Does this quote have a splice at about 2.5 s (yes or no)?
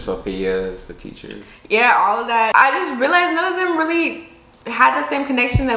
yes